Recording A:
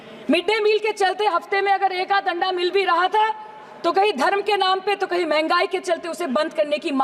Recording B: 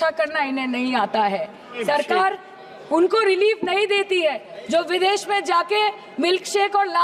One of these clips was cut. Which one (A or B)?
B